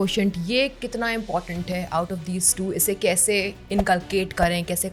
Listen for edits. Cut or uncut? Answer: uncut